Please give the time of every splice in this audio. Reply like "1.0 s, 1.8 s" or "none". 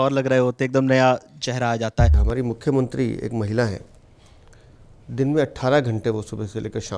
2.2 s